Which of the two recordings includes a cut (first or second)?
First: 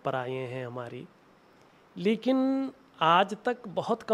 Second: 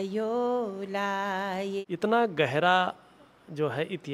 second